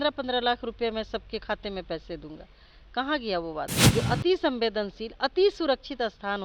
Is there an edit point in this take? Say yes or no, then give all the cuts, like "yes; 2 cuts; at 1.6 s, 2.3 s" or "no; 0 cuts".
yes; 1 cut; at 3.7 s